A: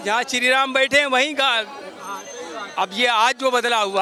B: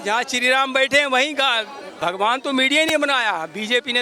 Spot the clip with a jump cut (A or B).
B